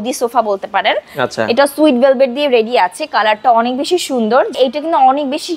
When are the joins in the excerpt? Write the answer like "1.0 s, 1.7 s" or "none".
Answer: 4.5 s